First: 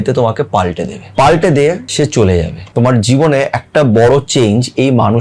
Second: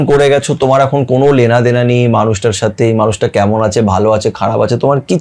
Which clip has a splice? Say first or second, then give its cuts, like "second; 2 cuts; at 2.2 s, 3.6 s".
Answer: first; 3 cuts; at 0.9 s, 1.9 s, 2.6 s